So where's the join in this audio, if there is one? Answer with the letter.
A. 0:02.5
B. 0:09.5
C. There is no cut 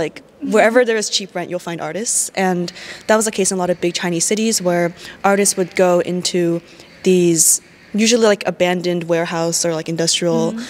C